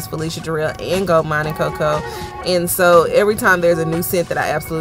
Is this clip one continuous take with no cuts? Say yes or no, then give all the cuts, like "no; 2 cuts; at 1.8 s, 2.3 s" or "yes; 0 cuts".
yes; 0 cuts